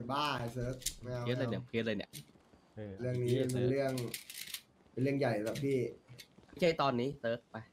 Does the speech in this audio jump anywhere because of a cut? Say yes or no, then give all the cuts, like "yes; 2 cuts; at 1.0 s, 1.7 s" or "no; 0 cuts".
no; 0 cuts